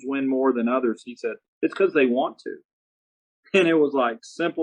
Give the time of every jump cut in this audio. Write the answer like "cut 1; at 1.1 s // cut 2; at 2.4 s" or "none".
cut 1; at 1.5 s